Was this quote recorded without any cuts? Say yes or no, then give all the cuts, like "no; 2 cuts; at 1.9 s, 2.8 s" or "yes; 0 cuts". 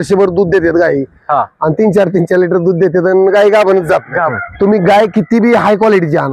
no; 1 cut; at 4.4 s